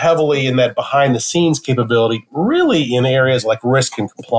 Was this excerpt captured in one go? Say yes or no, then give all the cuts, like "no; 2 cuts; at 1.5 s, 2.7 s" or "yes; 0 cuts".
yes; 0 cuts